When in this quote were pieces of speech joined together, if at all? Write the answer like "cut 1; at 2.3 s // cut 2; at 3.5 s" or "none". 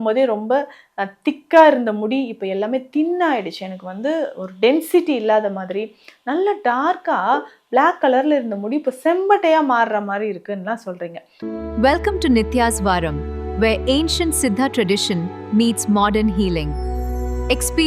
cut 1; at 11.3 s